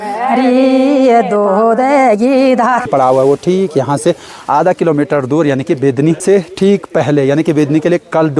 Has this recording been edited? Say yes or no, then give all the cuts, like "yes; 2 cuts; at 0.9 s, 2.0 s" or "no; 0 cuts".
yes; 2 cuts; at 2.9 s, 6.2 s